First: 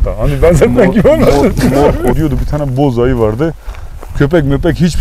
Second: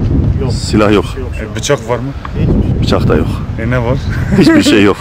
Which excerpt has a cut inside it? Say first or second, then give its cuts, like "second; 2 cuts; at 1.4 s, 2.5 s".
first; 1 cut; at 2.2 s